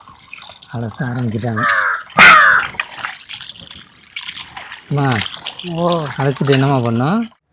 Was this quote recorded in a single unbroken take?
yes; 0 cuts

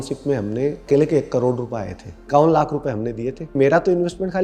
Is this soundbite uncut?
no; 3 cuts; at 0.8 s, 2.2 s, 3.5 s

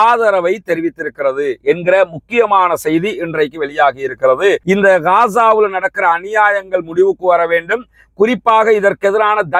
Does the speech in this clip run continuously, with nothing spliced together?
yes; 0 cuts

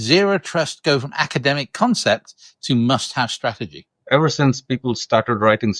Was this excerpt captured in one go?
no; 1 cut; at 4.1 s

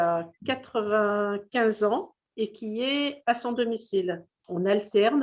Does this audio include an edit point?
yes; 1 cut; at 4.3 s

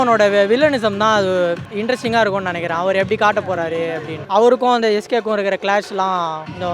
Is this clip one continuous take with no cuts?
yes; 0 cuts

